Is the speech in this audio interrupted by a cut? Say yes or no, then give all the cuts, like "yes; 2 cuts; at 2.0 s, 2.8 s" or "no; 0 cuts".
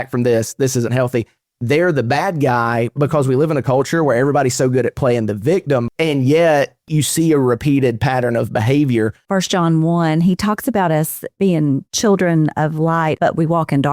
yes; 4 cuts; at 5.9 s, 9.2 s, 11.9 s, 13.2 s